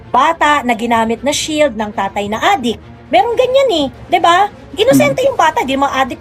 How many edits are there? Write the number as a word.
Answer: zero